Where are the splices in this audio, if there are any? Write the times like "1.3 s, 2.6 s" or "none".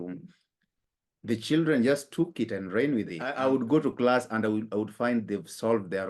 3.2 s